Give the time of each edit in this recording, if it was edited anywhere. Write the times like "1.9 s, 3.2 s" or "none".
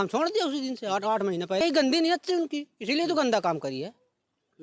1.6 s

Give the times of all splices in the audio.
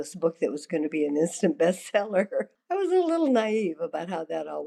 2.6 s

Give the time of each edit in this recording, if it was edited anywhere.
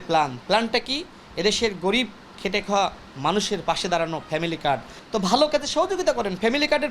4.9 s

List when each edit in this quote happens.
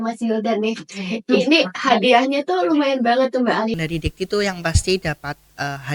3.7 s

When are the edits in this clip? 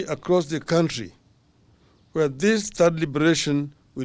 none

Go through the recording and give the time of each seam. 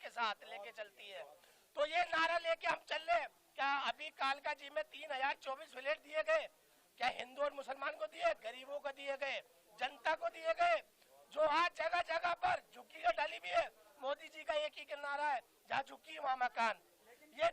none

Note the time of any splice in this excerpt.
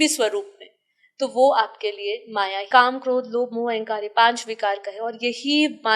2.7 s

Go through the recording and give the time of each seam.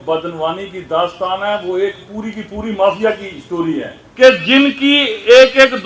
4.1 s

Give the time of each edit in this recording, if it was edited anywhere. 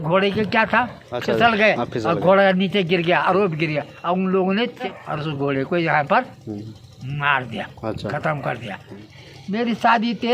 1.1 s, 5.0 s, 9.1 s

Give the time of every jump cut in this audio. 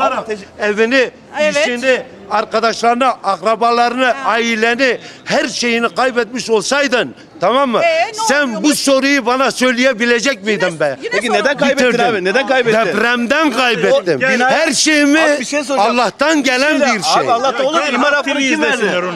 none

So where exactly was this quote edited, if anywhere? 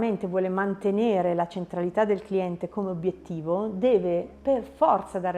4.3 s

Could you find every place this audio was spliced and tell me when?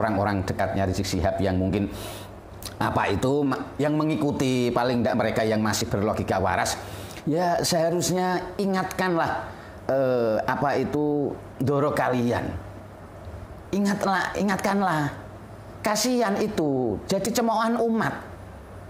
none

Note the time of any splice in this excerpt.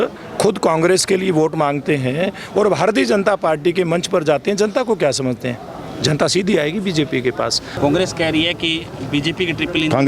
7.7 s

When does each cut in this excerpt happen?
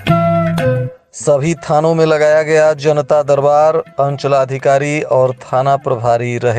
0.9 s

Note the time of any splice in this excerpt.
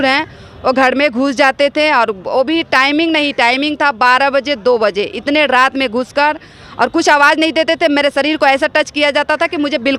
none

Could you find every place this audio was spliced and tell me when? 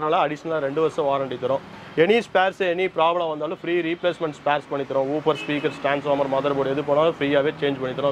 none

